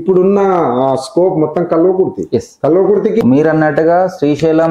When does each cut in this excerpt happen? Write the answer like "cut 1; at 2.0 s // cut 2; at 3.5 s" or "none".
cut 1; at 3.2 s